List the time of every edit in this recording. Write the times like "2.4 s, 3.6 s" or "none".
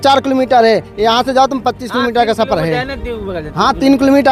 none